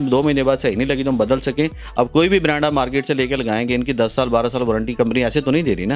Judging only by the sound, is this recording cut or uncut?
cut